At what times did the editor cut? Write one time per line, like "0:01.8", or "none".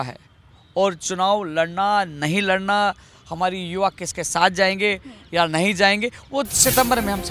none